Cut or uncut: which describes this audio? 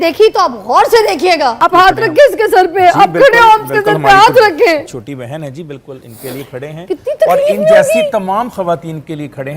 cut